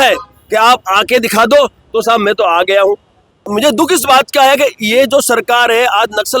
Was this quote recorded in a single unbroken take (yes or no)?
no